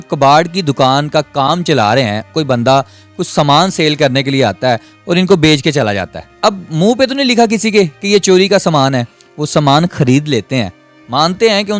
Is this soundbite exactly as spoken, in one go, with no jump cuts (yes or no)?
no